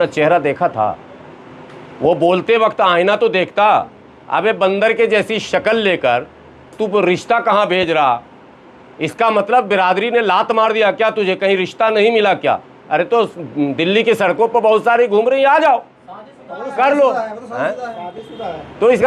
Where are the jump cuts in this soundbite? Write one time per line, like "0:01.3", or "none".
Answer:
none